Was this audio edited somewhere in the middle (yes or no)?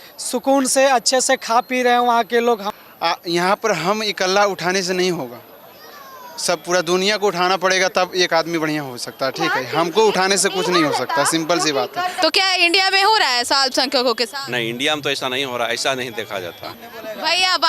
yes